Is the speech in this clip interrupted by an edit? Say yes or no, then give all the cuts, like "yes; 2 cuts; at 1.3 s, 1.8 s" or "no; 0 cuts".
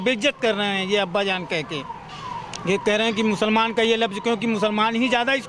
no; 0 cuts